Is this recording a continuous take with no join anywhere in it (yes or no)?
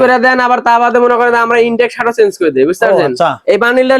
yes